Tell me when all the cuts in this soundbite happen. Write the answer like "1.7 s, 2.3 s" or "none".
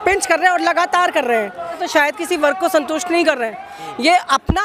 1.8 s